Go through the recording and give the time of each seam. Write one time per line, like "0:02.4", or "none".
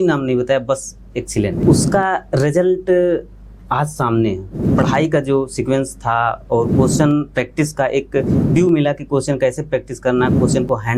0:01.6
0:04.6